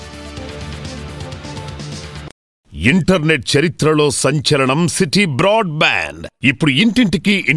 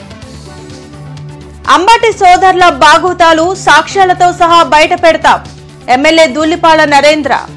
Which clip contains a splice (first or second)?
first